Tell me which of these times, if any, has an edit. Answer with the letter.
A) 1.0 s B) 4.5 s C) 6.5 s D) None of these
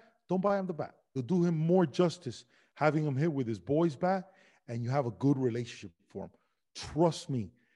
A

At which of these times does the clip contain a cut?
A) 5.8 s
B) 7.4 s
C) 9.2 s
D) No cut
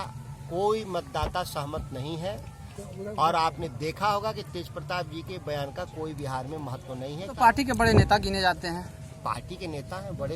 B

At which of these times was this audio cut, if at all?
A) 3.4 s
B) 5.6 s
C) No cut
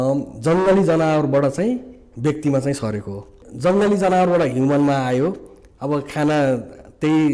A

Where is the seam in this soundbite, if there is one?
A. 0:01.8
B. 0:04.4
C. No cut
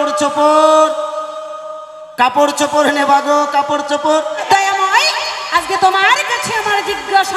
B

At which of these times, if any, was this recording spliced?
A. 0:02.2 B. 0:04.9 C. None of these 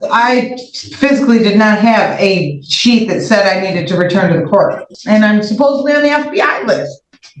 B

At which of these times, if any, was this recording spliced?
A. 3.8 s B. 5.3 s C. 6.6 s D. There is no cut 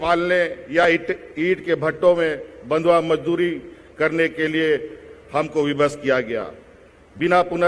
D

